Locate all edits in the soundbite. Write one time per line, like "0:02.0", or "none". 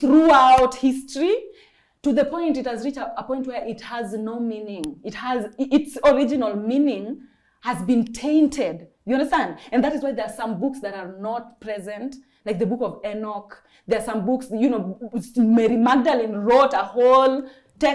none

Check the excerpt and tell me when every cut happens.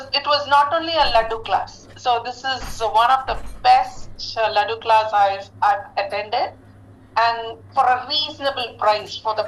0:01.8

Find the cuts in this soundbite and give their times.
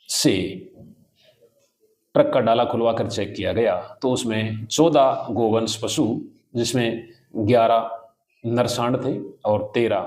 none

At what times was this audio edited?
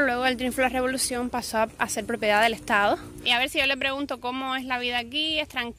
0:03.1

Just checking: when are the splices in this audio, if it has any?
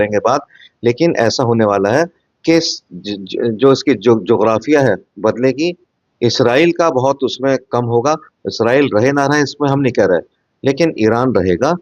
none

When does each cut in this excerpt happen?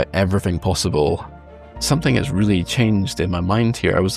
0:01.4

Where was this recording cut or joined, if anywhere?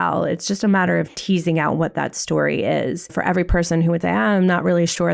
0:03.2

